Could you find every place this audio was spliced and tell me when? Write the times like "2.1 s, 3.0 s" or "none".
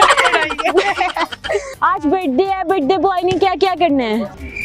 1.7 s

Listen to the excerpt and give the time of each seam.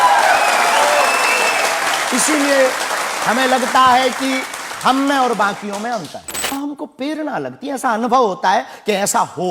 6.4 s

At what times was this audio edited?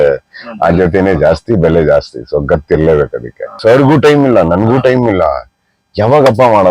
3.5 s

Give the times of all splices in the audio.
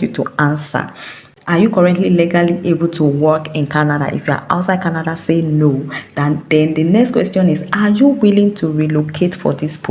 none

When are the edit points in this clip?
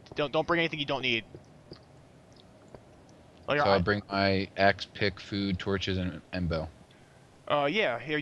5.0 s

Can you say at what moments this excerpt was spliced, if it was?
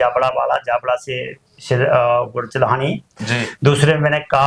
none

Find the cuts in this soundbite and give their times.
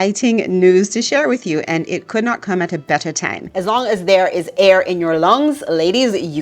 3.6 s

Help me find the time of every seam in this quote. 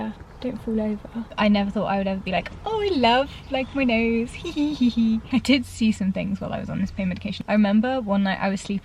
1.2 s, 5.2 s

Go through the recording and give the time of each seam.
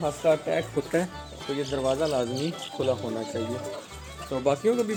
none

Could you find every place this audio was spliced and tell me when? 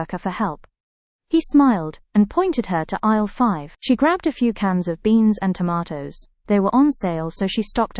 none

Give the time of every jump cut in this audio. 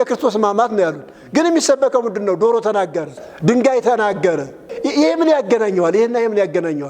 3.2 s, 4.7 s

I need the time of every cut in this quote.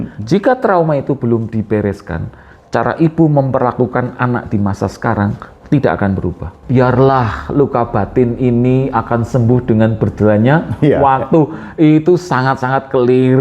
6.5 s

